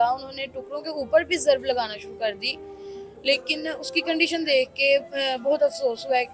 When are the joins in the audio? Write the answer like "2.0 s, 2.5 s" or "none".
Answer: none

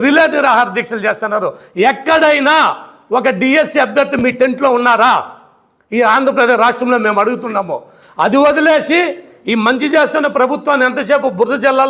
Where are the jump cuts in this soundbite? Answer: none

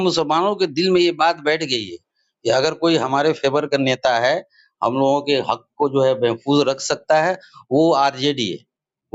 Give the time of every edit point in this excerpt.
none

